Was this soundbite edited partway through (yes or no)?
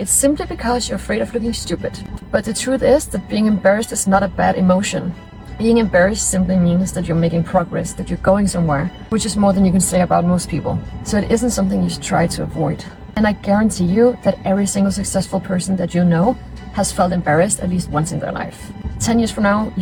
no